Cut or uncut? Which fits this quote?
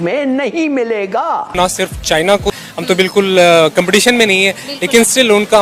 cut